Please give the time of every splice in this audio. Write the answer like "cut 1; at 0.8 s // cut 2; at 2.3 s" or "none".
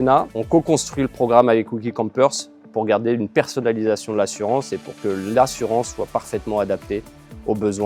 none